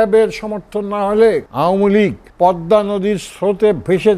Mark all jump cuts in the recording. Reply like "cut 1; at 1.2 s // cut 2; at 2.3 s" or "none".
cut 1; at 1.5 s // cut 2; at 2.2 s